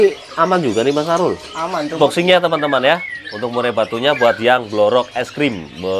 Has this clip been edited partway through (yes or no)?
yes